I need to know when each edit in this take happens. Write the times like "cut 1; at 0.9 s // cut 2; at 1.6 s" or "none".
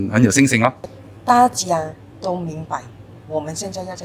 cut 1; at 0.9 s